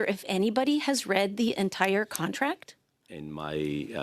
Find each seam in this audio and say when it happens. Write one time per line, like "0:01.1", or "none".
0:03.1